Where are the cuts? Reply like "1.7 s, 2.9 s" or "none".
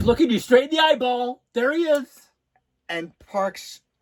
none